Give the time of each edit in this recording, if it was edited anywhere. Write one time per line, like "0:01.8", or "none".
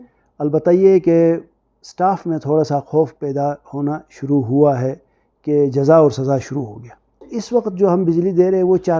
0:07.3